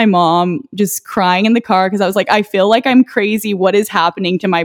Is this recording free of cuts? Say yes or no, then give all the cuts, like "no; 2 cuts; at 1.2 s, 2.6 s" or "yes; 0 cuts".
yes; 0 cuts